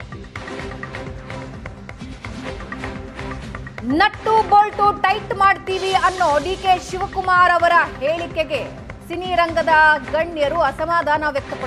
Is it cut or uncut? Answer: cut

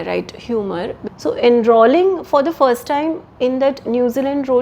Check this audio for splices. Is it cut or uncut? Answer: cut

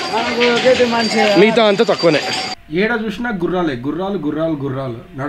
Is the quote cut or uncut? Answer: cut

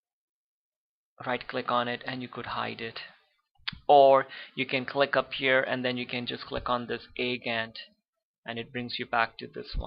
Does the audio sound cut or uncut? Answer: cut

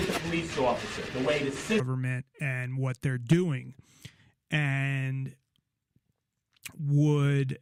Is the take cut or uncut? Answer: uncut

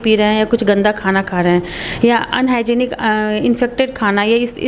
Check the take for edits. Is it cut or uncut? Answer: uncut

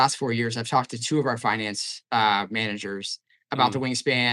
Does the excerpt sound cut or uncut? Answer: uncut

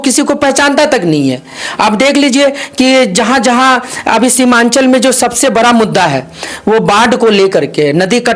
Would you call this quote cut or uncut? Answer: uncut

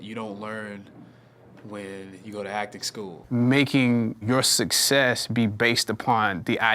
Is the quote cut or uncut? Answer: cut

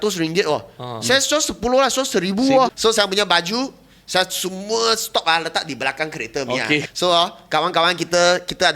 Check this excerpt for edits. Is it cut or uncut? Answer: cut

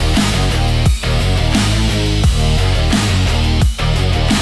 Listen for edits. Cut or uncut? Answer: uncut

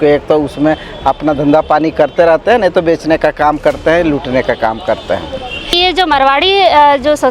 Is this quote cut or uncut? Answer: cut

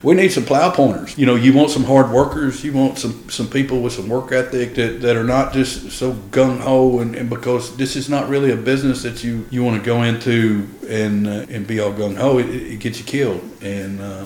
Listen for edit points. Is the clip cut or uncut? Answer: cut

